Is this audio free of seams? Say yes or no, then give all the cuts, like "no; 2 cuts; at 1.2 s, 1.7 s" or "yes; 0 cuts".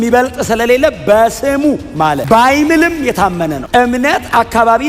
no; 1 cut; at 3.6 s